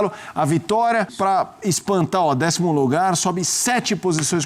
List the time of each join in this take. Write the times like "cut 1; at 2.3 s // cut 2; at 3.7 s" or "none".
cut 1; at 1.1 s